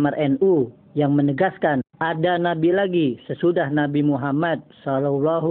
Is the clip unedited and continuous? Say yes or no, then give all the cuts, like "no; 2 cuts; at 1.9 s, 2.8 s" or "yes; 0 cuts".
yes; 0 cuts